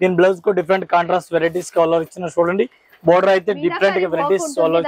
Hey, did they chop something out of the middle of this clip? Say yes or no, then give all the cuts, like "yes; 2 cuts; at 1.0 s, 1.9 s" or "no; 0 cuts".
no; 0 cuts